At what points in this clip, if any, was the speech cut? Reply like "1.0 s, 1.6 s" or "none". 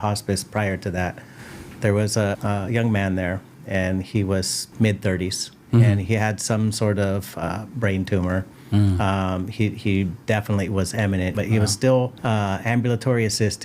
2.4 s, 4.6 s, 11.3 s, 12.2 s